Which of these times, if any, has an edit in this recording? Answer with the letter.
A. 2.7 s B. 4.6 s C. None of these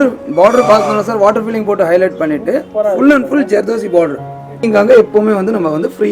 B